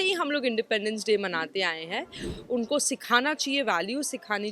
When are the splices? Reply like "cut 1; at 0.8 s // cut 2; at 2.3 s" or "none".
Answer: cut 1; at 2.2 s